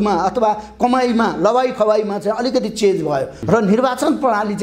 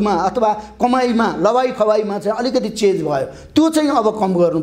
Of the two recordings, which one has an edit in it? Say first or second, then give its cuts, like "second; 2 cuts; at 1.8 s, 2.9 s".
first; 1 cut; at 3.4 s